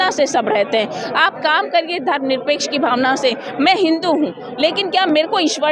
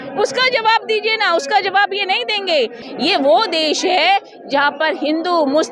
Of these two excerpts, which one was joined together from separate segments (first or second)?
second